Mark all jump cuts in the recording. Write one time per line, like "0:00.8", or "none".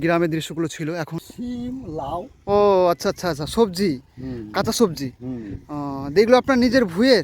0:01.2